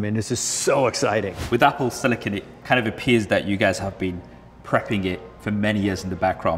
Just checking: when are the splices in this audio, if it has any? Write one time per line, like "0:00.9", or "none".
0:01.4